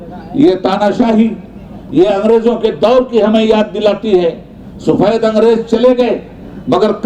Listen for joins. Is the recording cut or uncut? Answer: uncut